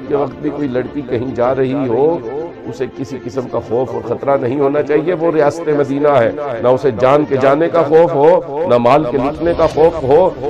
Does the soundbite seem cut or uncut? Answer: uncut